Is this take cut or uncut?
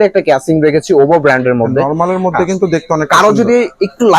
uncut